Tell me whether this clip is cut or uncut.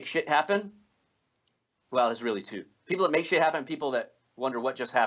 uncut